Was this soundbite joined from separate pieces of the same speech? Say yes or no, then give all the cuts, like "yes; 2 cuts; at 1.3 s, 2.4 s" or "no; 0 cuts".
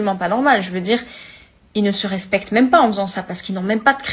yes; 1 cut; at 2.8 s